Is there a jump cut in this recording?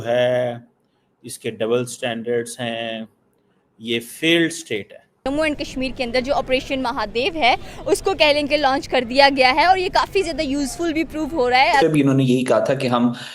yes; 2 cuts; at 5.3 s, 11.8 s

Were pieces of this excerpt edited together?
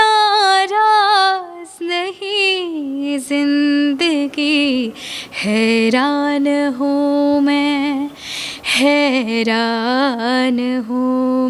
no; 0 cuts

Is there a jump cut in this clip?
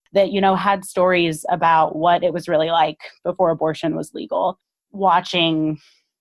yes; 1 cut; at 4.8 s

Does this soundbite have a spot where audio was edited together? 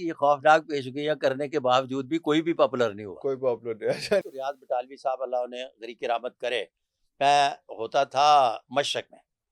yes; 1 cut; at 4.3 s

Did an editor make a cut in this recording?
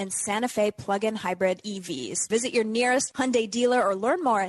yes; 1 cut; at 2.2 s

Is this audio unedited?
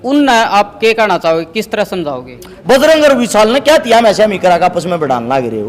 no; 1 cut; at 2.5 s

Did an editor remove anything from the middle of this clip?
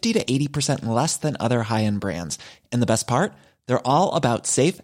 no; 0 cuts

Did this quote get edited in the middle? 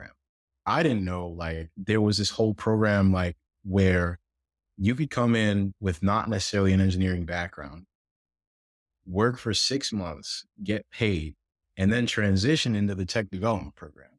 no; 0 cuts

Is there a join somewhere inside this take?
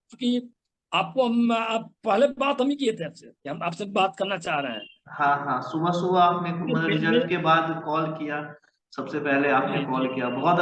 no; 0 cuts

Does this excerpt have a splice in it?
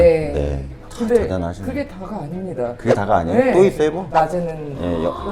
yes; 1 cut; at 4.0 s

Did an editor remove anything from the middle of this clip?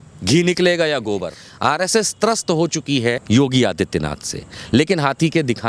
yes; 2 cuts; at 1.4 s, 3.2 s

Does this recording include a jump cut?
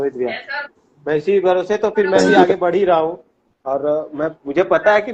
no; 0 cuts

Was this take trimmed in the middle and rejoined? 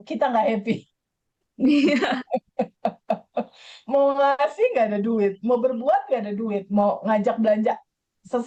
no; 0 cuts

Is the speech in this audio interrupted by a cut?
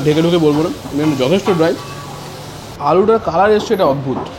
yes; 1 cut; at 2.6 s

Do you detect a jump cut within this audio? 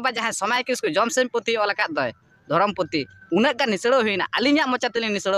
no; 0 cuts

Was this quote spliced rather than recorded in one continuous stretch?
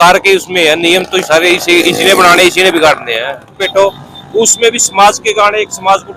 yes; 1 cut; at 3.6 s

